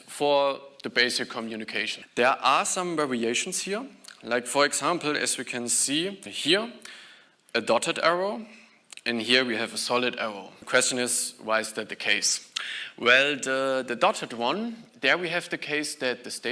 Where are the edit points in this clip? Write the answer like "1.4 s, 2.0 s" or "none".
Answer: 2.0 s, 6.3 s, 10.5 s